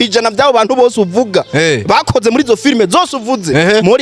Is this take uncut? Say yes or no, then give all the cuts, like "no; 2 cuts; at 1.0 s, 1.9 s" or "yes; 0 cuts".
yes; 0 cuts